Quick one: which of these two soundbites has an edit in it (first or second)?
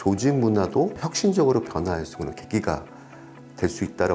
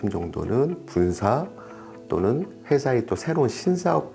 first